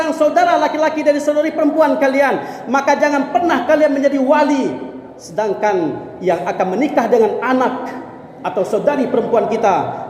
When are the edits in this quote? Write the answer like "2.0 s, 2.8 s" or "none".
none